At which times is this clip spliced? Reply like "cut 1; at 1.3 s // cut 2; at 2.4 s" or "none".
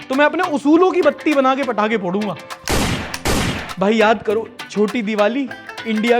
cut 1; at 2.5 s // cut 2; at 3.6 s